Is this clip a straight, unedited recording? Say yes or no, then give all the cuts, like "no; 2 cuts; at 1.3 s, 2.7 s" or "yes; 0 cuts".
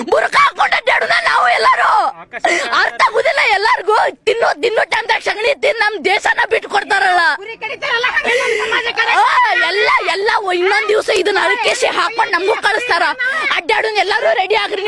yes; 0 cuts